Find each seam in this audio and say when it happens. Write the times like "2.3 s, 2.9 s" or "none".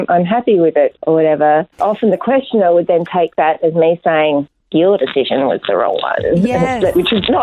1.0 s